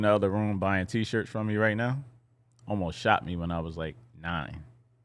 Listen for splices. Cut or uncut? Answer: uncut